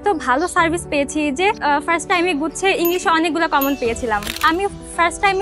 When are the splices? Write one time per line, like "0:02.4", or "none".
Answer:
0:01.6
0:04.4